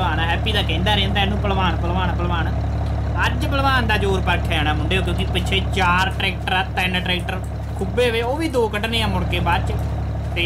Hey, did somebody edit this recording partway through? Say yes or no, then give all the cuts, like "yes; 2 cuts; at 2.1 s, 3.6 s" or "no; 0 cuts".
no; 0 cuts